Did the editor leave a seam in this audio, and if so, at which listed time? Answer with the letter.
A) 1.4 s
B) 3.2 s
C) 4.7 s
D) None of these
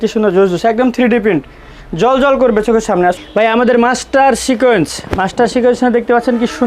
B